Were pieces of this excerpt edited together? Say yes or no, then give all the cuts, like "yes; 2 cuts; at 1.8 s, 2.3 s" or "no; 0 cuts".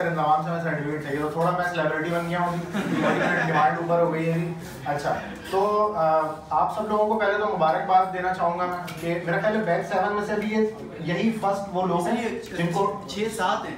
no; 0 cuts